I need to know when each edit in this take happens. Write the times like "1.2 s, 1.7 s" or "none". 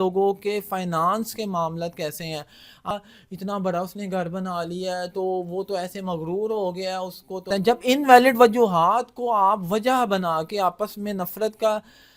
2.9 s, 7.5 s